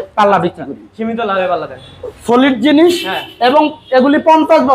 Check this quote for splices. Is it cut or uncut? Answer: uncut